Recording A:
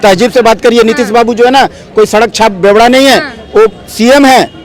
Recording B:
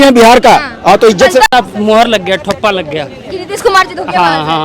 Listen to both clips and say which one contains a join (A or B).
B